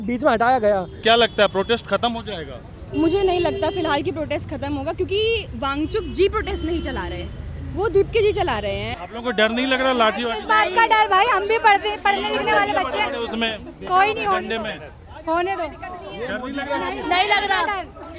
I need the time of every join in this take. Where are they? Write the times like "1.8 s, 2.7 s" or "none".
0.9 s, 8.9 s

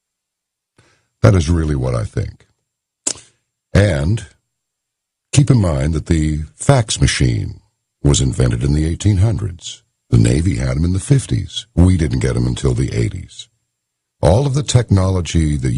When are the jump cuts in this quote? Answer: none

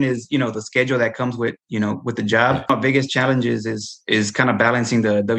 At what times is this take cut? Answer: 2.7 s

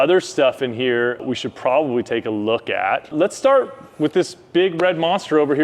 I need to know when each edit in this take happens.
1.2 s, 3.1 s

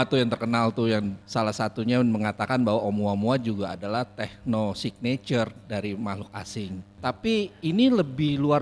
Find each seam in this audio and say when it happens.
1.2 s, 6.9 s

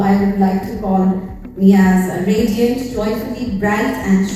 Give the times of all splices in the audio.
none

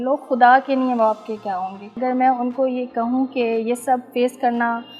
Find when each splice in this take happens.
1.9 s

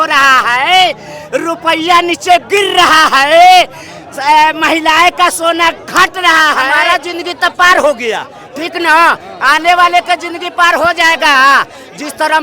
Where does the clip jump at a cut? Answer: 6.7 s

